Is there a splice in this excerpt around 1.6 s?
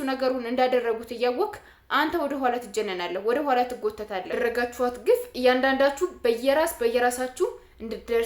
no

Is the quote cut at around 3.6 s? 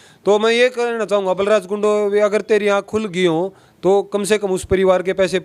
no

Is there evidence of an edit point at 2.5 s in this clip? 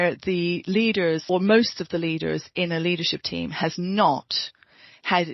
no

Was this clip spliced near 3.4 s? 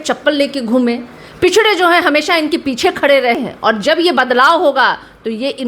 yes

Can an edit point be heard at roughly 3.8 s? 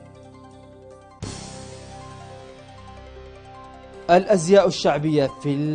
yes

